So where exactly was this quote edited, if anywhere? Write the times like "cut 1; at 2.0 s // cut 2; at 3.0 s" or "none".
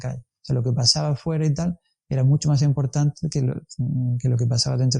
none